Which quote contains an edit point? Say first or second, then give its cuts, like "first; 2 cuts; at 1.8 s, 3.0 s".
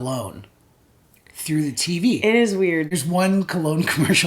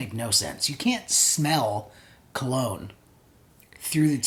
first; 1 cut; at 2.9 s